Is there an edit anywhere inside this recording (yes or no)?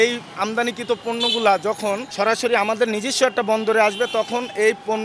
yes